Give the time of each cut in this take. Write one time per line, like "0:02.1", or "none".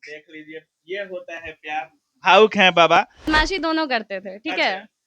0:03.3